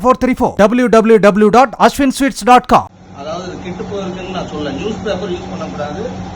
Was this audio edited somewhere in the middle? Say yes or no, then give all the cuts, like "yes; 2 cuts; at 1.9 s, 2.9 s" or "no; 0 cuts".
yes; 1 cut; at 2.9 s